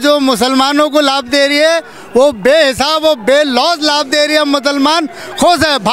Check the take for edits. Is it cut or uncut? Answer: uncut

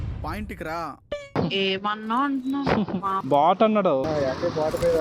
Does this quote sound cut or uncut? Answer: cut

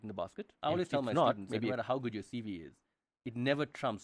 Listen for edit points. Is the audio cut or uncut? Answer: cut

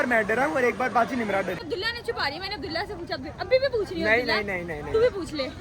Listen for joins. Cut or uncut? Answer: cut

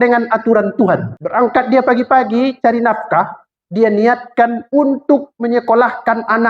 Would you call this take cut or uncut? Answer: cut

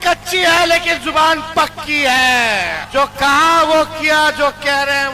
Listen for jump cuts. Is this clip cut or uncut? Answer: cut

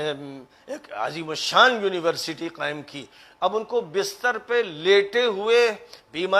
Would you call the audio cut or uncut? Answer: uncut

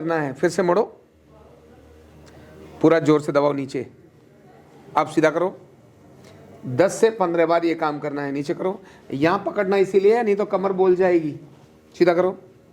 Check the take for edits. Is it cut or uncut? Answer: uncut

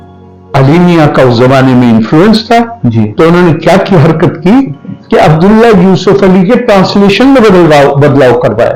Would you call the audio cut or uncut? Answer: uncut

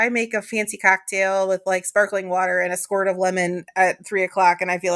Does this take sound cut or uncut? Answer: uncut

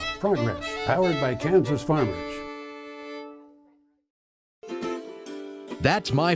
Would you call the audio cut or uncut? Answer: cut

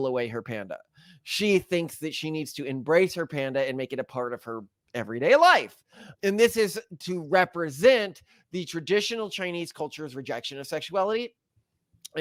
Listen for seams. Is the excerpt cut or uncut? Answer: uncut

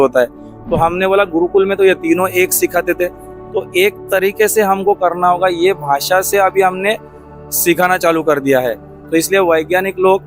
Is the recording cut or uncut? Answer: uncut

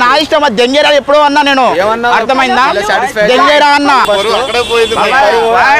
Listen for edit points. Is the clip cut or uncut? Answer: cut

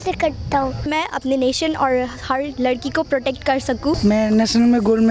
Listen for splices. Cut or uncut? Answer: cut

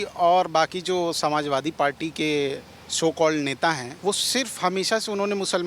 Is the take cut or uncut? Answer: cut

